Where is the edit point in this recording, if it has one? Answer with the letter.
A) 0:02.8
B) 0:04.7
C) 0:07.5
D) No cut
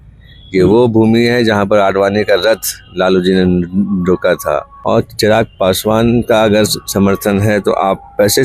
B